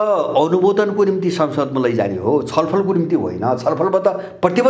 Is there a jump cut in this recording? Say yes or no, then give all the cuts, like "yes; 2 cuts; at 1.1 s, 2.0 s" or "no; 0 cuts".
no; 0 cuts